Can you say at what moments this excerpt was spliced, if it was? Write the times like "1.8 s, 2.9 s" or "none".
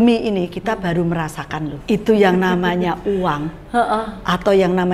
1.7 s